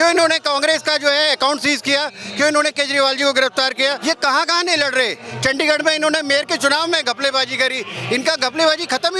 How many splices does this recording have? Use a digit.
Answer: 1